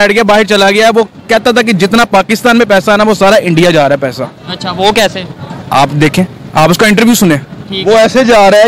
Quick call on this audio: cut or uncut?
uncut